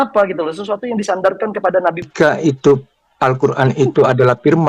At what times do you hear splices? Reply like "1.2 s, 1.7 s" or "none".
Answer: 2.1 s